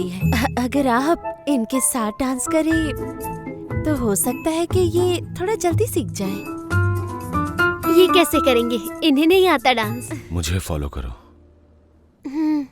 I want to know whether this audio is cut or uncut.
cut